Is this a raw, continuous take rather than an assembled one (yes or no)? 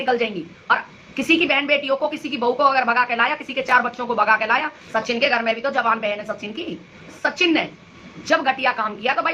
no